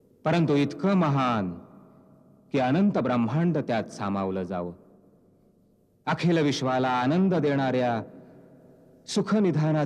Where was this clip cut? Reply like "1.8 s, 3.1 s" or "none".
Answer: none